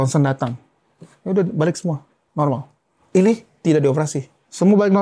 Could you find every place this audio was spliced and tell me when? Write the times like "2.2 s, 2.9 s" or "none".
none